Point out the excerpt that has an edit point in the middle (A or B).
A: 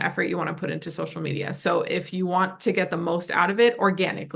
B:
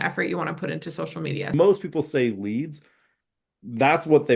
B